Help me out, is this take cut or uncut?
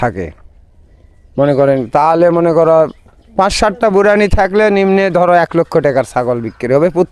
uncut